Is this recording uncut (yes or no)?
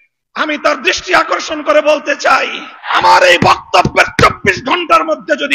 no